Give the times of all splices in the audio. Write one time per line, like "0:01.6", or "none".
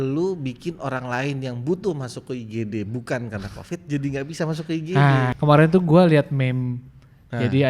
0:05.3